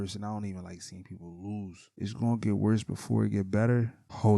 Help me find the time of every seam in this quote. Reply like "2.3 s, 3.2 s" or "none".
2.0 s